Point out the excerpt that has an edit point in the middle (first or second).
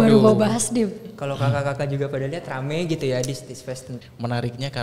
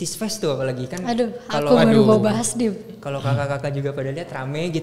first